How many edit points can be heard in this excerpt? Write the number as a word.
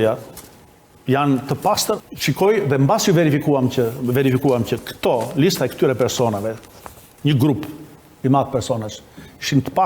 one